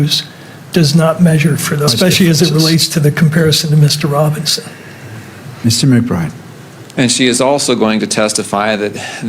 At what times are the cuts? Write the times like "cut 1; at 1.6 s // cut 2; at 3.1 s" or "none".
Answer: cut 1; at 1.9 s